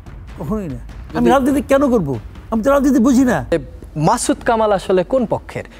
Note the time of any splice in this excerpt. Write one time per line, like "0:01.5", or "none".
0:03.5